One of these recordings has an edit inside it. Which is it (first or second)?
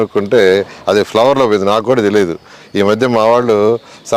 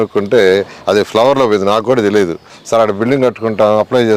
second